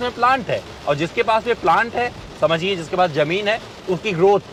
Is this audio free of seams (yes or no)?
yes